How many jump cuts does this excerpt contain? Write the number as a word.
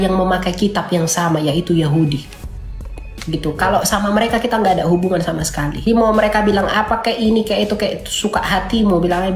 one